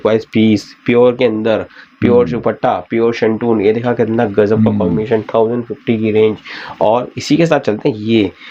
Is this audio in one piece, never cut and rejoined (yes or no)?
yes